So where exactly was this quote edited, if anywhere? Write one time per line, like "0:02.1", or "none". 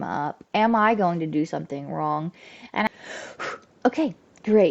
0:02.9

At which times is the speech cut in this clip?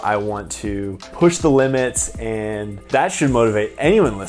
0:01.1
0:02.8

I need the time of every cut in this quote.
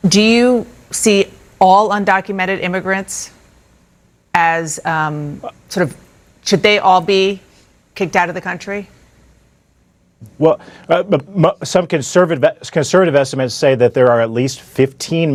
none

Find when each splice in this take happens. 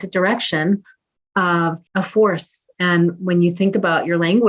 0:01.4

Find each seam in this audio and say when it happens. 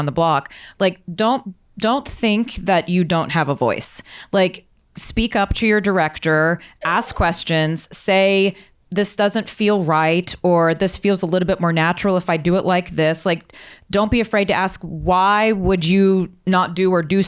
none

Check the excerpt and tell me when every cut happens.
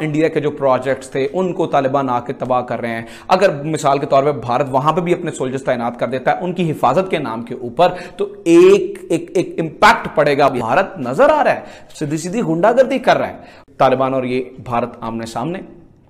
0:10.5
0:13.6

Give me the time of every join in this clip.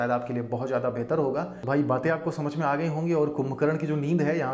none

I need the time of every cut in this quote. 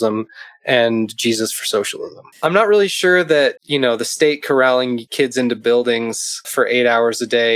0:02.2
0:03.6
0:05.0
0:06.5

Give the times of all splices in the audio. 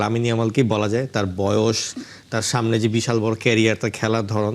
none

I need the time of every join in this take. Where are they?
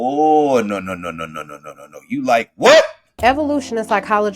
0:03.1

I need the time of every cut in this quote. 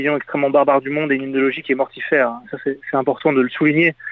none

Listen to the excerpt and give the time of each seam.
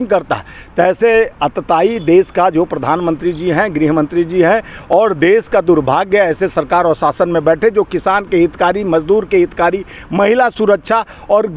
none

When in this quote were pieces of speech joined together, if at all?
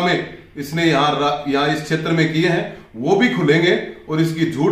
none

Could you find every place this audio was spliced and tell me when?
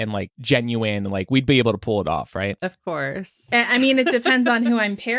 0:03.5

